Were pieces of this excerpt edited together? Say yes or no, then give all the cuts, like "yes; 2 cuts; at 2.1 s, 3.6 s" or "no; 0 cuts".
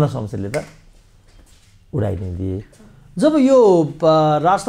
no; 0 cuts